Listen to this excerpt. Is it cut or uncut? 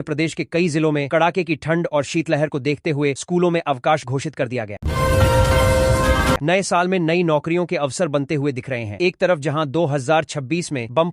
cut